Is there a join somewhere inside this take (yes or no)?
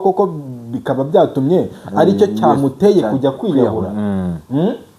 no